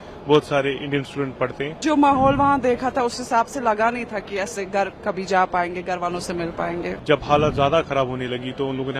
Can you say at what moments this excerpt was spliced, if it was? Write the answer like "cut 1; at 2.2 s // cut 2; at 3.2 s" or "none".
cut 1; at 1.8 s // cut 2; at 7.0 s